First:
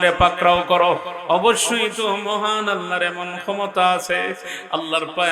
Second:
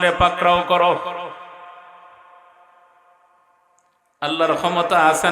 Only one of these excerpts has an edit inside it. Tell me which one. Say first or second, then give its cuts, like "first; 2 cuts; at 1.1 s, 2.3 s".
first; 1 cut; at 1.1 s